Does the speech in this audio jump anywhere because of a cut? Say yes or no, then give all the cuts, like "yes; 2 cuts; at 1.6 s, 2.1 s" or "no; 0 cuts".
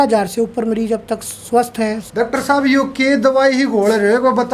yes; 1 cut; at 2.0 s